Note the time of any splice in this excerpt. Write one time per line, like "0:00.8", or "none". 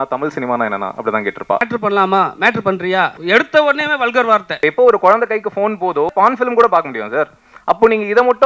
0:01.7
0:03.2
0:04.6
0:06.1